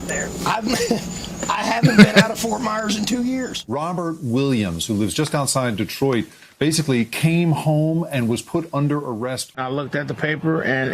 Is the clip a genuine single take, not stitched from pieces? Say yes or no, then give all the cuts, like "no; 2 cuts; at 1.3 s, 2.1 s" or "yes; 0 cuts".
no; 2 cuts; at 3.6 s, 9.5 s